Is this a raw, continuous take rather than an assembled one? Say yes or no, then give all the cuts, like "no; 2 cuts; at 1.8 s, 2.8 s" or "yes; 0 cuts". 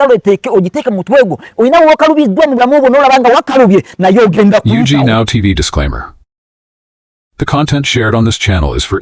no; 1 cut; at 4.7 s